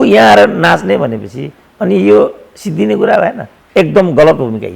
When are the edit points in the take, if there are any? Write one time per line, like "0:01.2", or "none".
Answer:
0:03.5